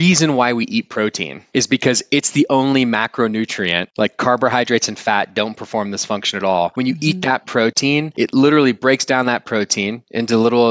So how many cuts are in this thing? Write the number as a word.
two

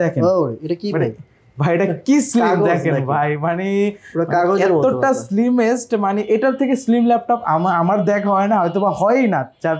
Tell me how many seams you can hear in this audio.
zero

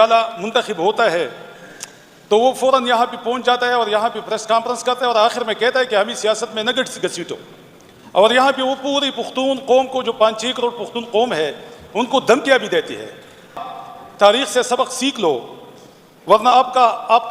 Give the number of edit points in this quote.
one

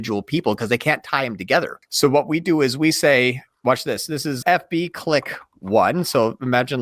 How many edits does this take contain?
two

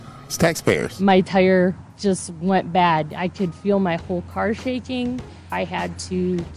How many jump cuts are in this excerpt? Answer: two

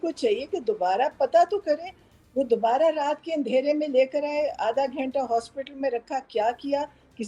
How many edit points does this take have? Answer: zero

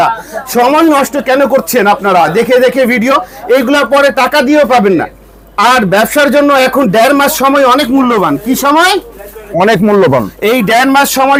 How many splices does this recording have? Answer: zero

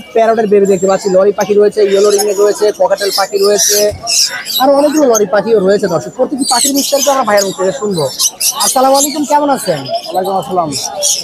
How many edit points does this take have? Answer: zero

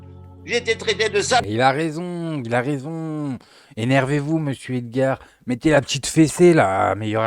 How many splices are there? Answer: one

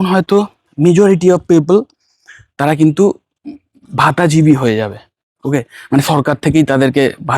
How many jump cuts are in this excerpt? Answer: zero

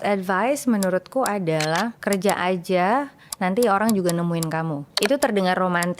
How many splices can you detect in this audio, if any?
two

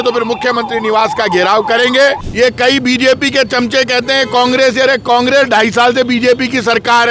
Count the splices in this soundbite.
one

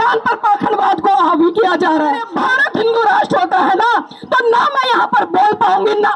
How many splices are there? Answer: one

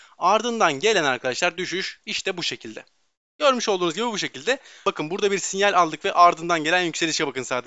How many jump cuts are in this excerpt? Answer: one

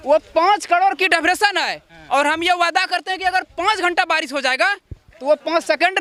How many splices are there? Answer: zero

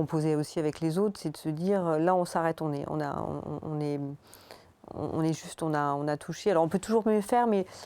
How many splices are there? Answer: zero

